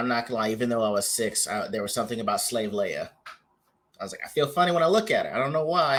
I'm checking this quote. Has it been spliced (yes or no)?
no